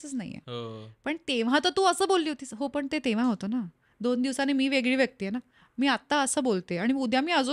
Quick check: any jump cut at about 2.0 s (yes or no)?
no